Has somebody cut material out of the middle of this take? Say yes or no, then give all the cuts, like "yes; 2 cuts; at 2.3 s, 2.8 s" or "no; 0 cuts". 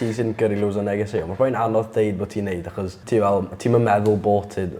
yes; 1 cut; at 2.9 s